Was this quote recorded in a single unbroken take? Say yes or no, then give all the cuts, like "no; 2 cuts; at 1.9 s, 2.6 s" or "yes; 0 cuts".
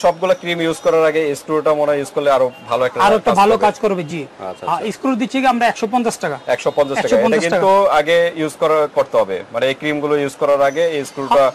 yes; 0 cuts